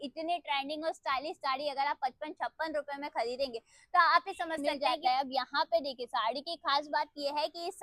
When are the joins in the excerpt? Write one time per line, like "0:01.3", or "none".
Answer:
0:04.6